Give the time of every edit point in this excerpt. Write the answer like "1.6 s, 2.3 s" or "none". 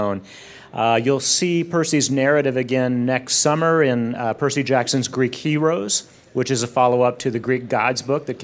5.1 s